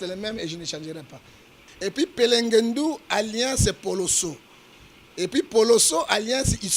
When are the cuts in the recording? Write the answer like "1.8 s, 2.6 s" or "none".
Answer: 1.6 s